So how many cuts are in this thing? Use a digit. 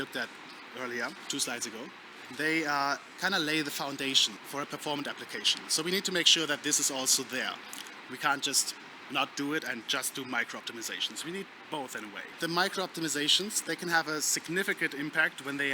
3